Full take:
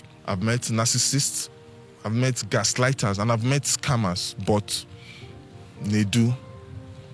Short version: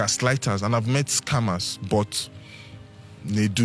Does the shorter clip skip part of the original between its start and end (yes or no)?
no